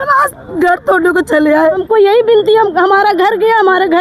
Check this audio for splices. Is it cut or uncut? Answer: cut